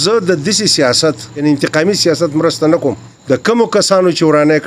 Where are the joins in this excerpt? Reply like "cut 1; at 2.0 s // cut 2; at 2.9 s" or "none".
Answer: cut 1; at 1.4 s // cut 2; at 3.1 s